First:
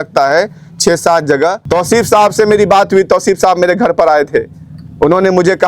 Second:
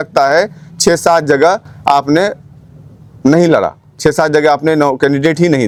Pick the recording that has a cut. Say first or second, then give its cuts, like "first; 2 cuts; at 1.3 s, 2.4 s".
first; 1 cut; at 1.6 s